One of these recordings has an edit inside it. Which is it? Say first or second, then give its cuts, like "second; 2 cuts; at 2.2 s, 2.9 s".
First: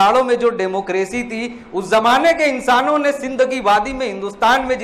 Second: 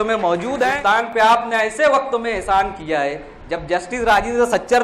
second; 1 cut; at 1.1 s